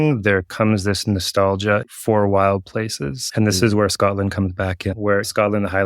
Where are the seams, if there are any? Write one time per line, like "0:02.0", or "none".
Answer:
0:01.8